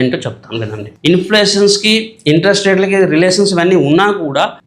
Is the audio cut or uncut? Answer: cut